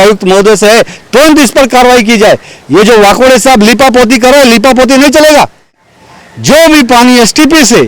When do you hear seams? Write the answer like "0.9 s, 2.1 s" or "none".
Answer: 5.9 s